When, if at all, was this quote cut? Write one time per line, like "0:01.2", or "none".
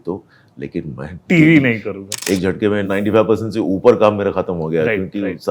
0:01.2
0:02.4